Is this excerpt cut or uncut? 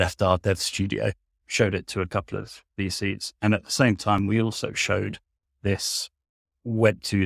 uncut